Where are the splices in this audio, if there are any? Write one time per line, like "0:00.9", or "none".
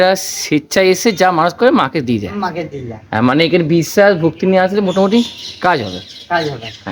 none